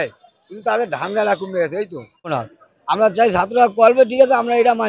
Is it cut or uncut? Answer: cut